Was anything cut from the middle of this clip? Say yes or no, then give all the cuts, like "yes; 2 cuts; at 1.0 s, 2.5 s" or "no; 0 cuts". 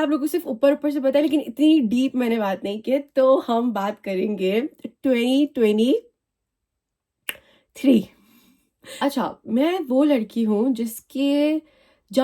no; 0 cuts